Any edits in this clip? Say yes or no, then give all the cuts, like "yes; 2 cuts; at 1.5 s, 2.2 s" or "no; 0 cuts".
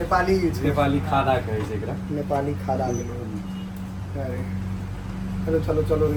no; 0 cuts